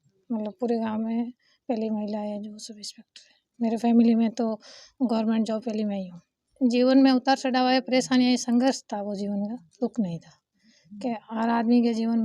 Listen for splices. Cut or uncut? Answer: cut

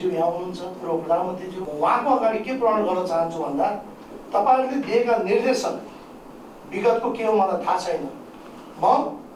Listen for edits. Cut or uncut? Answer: cut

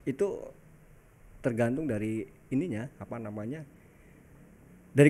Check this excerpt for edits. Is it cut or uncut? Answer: uncut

